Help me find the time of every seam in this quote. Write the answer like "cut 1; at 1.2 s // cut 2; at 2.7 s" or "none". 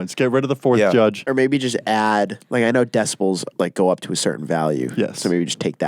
cut 1; at 1.2 s